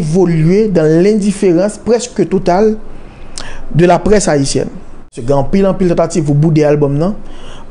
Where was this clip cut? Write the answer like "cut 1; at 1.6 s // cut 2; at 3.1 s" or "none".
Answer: cut 1; at 5.2 s